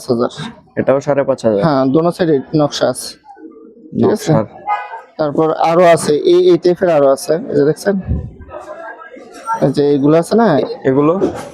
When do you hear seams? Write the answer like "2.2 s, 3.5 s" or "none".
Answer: 10.6 s